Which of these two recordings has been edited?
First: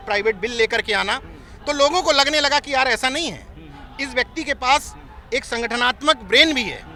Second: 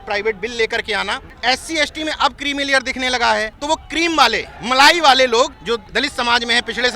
second; 4 cuts; at 1.2 s, 3.5 s, 4.5 s, 5.8 s

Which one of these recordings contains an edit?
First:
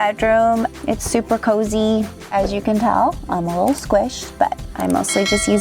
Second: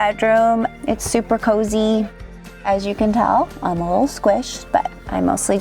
first; 1 cut; at 2.2 s

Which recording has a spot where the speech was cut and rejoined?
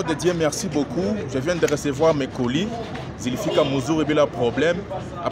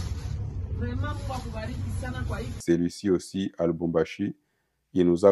second; 1 cut; at 2.6 s

